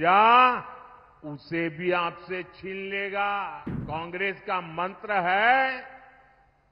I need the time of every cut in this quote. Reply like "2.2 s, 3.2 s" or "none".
3.7 s